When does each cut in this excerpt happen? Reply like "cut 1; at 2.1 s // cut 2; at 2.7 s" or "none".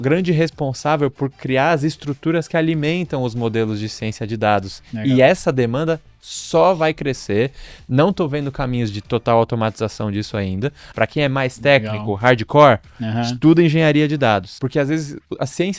cut 1; at 10.8 s // cut 2; at 14.6 s